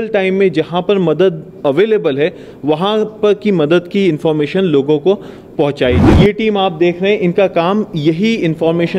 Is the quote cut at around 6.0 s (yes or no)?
yes